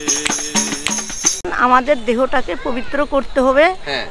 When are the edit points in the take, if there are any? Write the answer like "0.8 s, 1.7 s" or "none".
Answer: 1.4 s